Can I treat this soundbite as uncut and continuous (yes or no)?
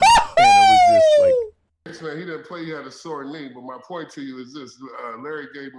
no